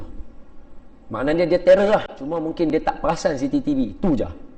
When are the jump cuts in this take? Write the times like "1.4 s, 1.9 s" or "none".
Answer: 2.7 s